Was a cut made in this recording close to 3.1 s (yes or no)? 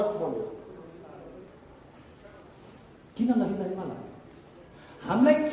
no